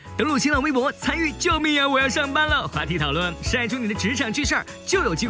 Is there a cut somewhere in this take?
no; 0 cuts

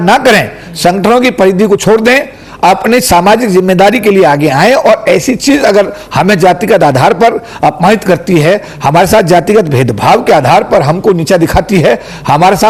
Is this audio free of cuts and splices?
yes; 0 cuts

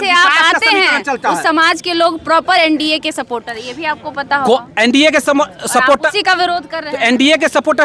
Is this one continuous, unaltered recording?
yes; 0 cuts

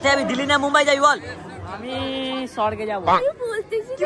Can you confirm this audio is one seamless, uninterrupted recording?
no; 1 cut; at 3.1 s

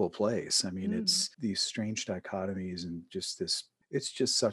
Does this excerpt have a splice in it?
yes; 1 cut; at 1.2 s

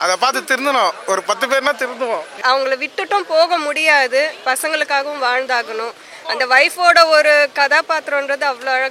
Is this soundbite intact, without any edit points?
no; 1 cut; at 2.4 s

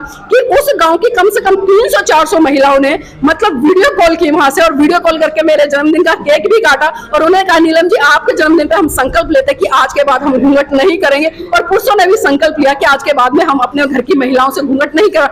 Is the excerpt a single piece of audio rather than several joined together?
yes; 0 cuts

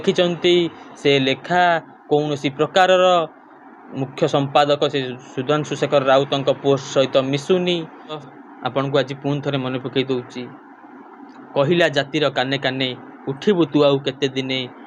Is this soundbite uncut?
no; 1 cut; at 8.0 s

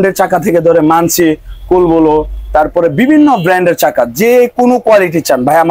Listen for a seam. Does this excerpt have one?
no; 0 cuts

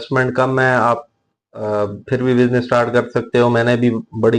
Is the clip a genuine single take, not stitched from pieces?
yes; 0 cuts

